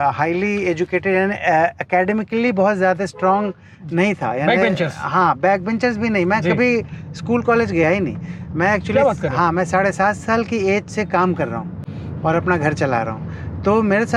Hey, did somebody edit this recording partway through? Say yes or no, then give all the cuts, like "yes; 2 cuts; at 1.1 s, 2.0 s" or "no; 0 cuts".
no; 0 cuts